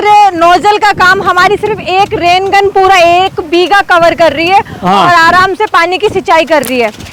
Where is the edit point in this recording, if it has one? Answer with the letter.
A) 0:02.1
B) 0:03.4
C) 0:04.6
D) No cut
D